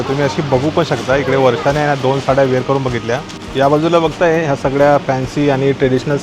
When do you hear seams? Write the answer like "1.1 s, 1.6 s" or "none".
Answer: 3.4 s